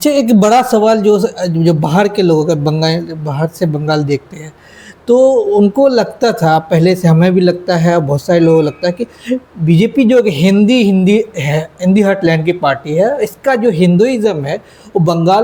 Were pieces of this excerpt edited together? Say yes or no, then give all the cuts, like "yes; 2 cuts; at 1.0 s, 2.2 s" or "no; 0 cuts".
no; 0 cuts